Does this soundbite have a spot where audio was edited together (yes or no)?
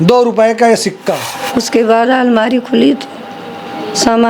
yes